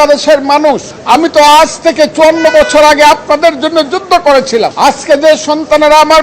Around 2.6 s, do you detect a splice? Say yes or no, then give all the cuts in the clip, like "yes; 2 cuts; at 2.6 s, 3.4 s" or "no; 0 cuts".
no; 2 cuts; at 0.9 s, 4.7 s